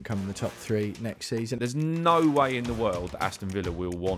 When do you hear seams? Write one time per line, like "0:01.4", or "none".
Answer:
0:01.6

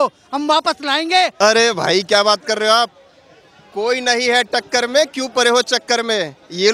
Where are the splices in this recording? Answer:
0:01.3

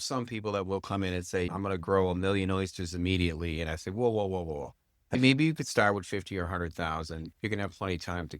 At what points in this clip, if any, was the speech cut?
0:01.5
0:05.1

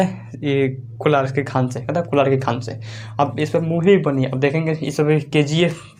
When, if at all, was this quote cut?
none

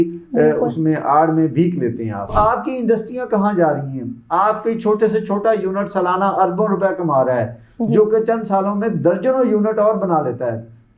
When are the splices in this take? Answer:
0:02.3

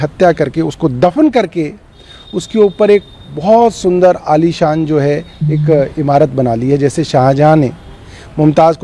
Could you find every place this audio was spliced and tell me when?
none

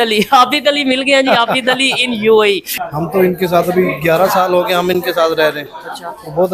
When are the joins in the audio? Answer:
0:02.7

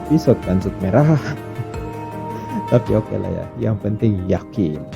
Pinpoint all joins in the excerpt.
none

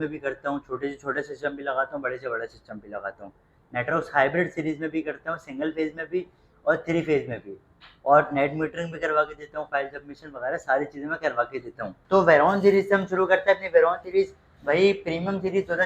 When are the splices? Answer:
0:12.3

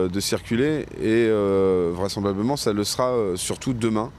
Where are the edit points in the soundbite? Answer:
none

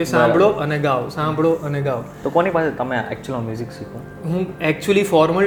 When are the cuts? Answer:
none

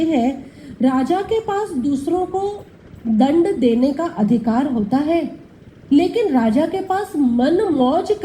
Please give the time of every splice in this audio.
none

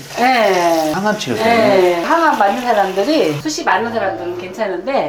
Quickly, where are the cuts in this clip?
none

